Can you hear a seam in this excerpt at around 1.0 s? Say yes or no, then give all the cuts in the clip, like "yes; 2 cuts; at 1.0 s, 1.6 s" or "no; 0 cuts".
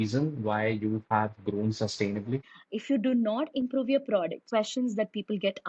no; 2 cuts; at 2.5 s, 4.4 s